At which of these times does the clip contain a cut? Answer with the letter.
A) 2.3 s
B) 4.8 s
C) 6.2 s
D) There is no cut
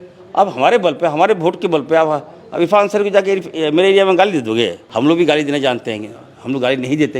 B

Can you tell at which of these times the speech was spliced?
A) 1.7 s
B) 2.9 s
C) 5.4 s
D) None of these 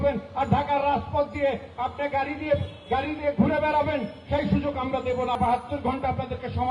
C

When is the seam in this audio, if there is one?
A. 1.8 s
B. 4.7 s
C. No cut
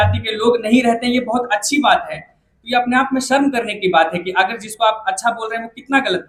C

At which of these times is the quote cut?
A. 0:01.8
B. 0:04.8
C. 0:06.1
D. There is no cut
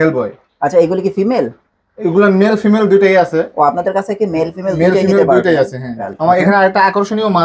C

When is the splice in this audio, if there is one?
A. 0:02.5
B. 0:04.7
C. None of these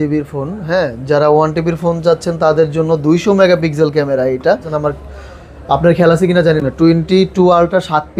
B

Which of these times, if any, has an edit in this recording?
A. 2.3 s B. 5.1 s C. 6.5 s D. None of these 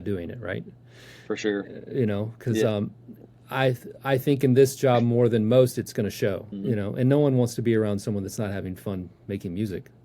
C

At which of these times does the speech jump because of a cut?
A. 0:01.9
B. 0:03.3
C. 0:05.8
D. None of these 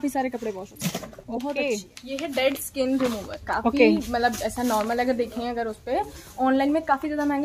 A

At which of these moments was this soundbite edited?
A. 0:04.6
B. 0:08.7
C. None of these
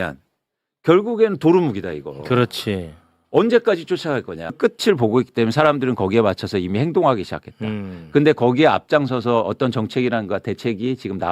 A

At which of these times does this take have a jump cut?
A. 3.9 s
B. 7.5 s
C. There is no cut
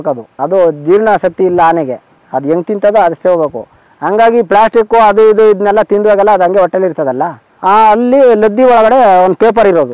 B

